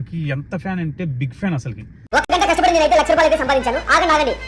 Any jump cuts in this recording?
yes; 1 cut; at 2.0 s

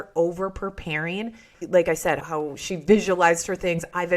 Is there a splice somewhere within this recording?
yes; 1 cut; at 1.5 s

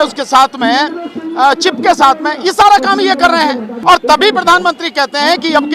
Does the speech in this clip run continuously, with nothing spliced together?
no; 1 cut; at 3.7 s

